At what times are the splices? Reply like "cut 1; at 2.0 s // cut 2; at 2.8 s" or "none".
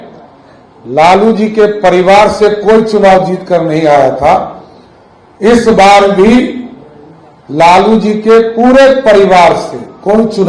none